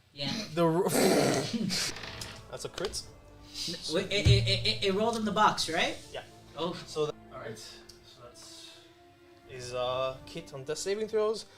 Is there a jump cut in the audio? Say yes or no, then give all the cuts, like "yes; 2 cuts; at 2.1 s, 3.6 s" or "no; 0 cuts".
yes; 2 cuts; at 1.8 s, 7.1 s